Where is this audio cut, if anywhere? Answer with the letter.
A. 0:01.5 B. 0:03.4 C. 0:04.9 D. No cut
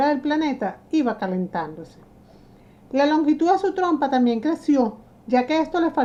D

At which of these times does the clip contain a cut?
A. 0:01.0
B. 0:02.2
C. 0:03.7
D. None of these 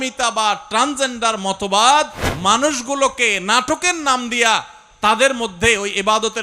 B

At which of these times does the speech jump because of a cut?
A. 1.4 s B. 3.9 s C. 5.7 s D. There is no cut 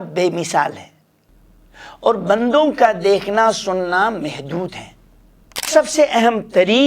C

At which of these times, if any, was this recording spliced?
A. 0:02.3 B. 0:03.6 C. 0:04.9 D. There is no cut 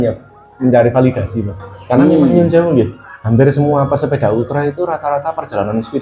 A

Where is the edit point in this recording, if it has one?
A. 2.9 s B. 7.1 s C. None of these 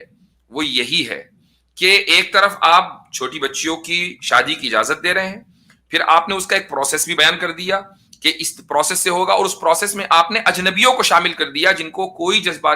B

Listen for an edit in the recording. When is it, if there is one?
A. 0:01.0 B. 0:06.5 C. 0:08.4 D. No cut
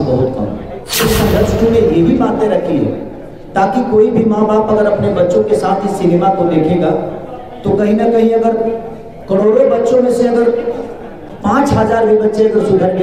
A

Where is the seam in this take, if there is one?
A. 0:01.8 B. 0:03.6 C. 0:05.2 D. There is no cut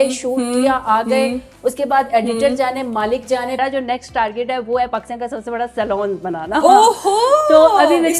B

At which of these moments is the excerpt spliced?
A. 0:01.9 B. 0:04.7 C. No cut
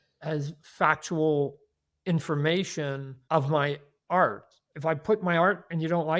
B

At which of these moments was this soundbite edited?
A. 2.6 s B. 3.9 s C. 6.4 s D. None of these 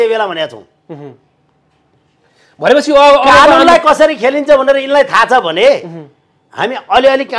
D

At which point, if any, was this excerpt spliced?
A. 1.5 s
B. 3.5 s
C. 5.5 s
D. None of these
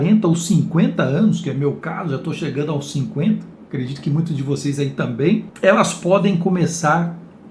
C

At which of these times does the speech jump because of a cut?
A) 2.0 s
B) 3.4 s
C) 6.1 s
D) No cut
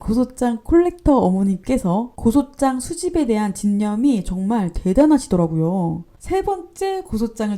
C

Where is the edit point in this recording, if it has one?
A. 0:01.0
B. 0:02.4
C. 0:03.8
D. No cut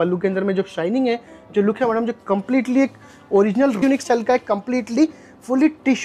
C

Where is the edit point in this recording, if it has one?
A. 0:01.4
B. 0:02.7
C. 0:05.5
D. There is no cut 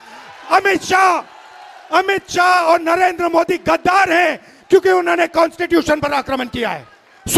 D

